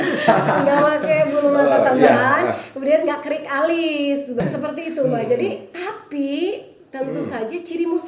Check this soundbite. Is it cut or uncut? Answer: cut